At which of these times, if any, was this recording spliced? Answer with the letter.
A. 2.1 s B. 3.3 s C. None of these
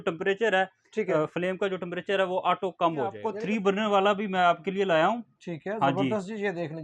B